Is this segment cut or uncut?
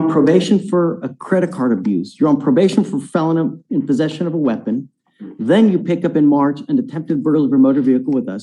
uncut